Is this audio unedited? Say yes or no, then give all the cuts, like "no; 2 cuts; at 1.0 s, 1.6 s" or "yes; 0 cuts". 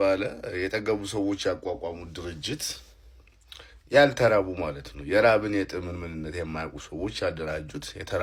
yes; 0 cuts